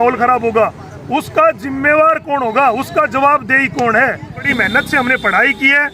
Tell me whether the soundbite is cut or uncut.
cut